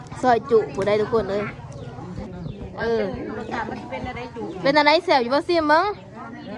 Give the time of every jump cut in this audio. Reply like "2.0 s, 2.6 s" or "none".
2.3 s